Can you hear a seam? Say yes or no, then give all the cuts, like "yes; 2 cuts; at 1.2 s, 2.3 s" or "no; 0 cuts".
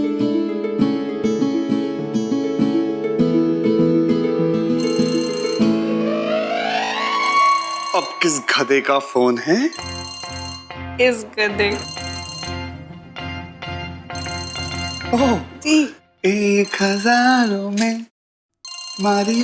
no; 0 cuts